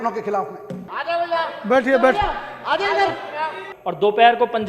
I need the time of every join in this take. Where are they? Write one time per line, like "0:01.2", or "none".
0:00.9
0:03.7